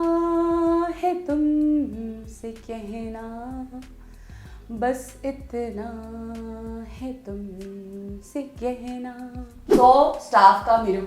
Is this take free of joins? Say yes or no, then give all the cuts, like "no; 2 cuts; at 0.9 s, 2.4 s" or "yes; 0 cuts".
no; 1 cut; at 9.7 s